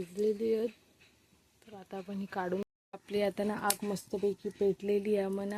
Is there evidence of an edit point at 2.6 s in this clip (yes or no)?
yes